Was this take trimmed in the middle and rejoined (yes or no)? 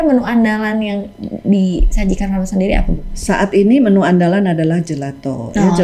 no